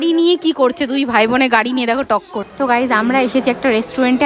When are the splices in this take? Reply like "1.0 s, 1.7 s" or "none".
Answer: 2.4 s